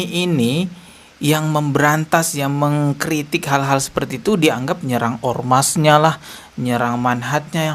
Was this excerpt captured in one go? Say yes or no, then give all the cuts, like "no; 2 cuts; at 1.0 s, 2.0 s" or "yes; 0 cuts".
yes; 0 cuts